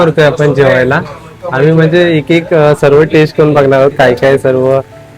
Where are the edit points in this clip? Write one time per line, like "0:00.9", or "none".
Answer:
none